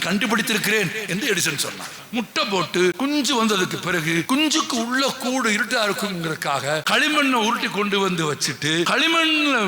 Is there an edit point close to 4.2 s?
yes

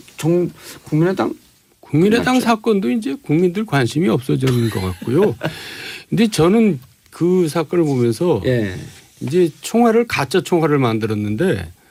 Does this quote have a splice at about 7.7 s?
no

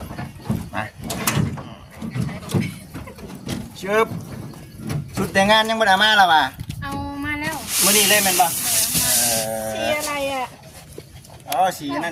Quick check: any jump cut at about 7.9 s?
no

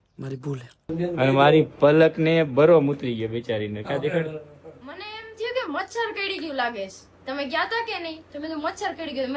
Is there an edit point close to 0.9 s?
yes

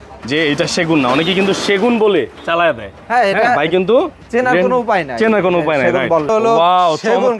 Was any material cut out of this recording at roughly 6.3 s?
yes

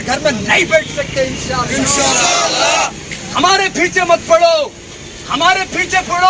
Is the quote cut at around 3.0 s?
yes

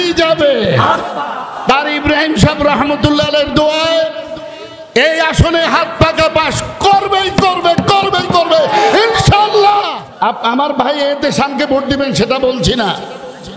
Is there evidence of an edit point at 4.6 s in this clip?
no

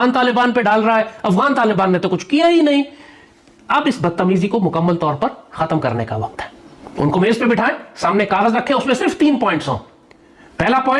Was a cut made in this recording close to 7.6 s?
no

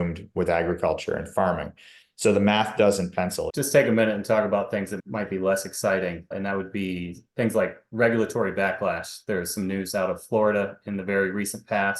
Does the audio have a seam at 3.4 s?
yes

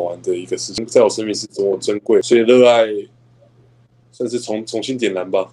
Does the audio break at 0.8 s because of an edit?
yes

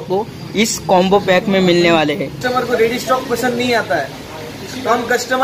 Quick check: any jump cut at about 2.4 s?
yes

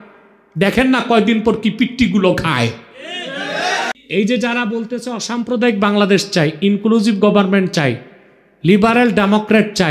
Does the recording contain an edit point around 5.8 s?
no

